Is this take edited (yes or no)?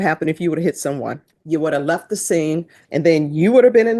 yes